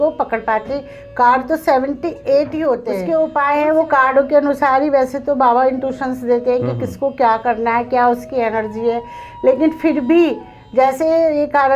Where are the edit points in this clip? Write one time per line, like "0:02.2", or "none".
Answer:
0:02.9